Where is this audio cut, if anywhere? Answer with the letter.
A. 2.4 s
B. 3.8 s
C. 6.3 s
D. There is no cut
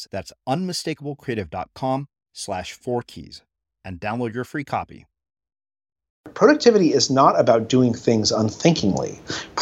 C